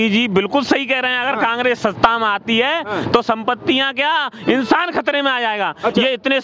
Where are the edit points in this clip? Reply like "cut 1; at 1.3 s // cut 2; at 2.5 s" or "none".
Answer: none

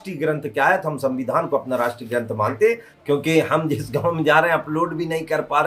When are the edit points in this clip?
cut 1; at 2.9 s

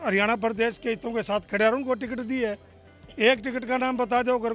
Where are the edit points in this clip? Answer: none

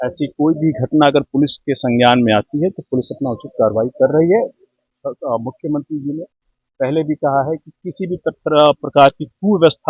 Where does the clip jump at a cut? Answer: none

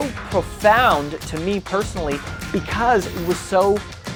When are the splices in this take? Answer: none

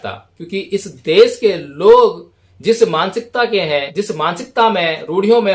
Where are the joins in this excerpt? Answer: cut 1; at 3.9 s

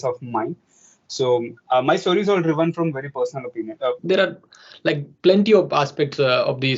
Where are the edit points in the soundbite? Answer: cut 1; at 4.0 s

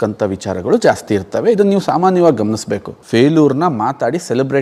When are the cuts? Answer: cut 1; at 2.9 s

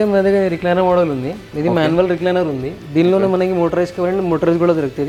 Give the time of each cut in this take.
none

